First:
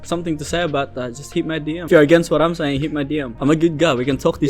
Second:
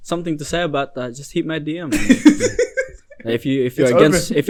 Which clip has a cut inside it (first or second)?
first